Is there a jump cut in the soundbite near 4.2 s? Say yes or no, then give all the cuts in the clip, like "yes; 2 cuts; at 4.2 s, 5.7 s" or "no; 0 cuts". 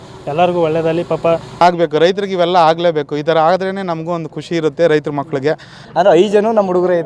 no; 2 cuts; at 1.6 s, 5.8 s